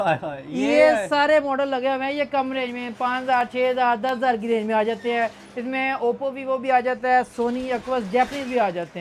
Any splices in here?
no; 0 cuts

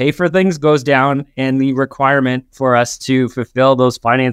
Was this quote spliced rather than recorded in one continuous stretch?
no; 0 cuts

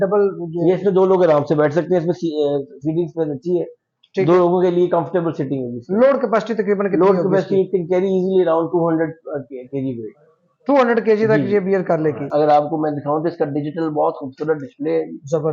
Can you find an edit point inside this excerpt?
yes; 1 cut; at 12.3 s

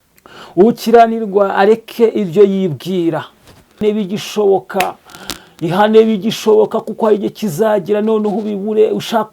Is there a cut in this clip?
yes; 1 cut; at 3.8 s

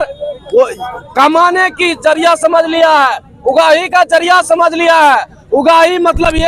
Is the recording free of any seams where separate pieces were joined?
yes; 0 cuts

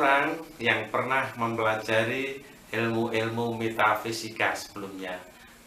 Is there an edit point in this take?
no; 0 cuts

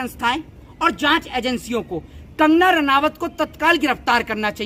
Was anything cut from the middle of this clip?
no; 0 cuts

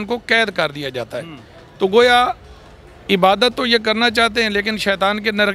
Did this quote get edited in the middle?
no; 0 cuts

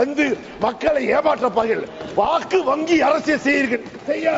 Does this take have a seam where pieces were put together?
no; 0 cuts

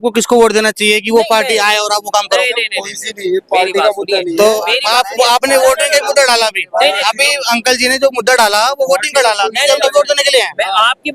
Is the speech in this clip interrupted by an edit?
no; 0 cuts

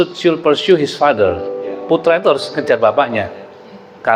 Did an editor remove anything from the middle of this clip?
no; 0 cuts

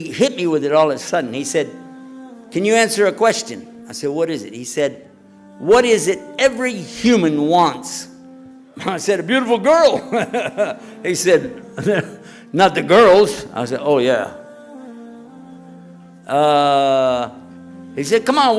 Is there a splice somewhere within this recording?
yes; 2 cuts; at 14.7 s, 16.2 s

